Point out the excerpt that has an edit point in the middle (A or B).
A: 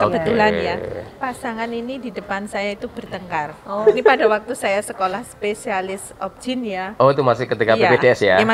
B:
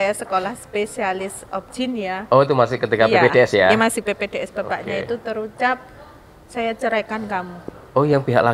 A